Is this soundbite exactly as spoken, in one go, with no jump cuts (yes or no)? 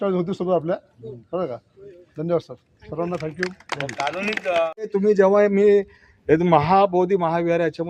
no